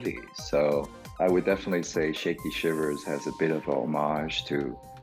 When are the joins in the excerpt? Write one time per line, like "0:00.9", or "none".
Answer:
0:01.0